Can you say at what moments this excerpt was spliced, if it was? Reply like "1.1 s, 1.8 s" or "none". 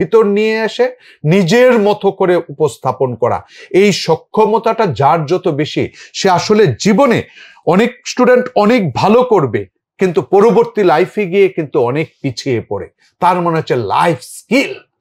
none